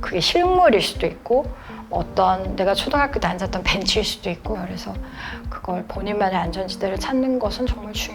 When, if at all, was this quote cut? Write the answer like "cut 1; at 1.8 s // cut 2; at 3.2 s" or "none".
cut 1; at 4.6 s